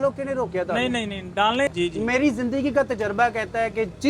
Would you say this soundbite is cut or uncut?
cut